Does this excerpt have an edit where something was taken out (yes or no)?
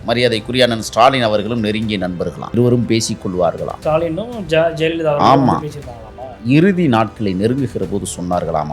yes